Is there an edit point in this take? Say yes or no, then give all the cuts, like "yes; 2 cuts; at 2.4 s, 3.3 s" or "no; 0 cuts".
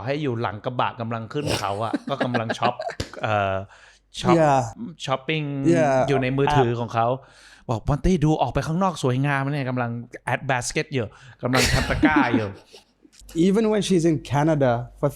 no; 0 cuts